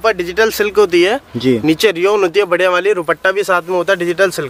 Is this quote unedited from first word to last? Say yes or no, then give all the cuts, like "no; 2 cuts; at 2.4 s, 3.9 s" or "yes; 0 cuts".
yes; 0 cuts